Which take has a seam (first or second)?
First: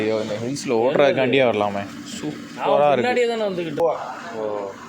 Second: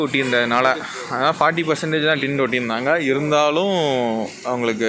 first